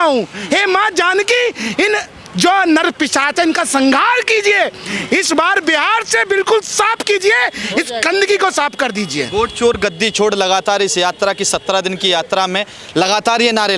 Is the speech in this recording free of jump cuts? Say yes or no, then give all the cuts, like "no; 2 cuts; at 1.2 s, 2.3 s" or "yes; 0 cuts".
yes; 0 cuts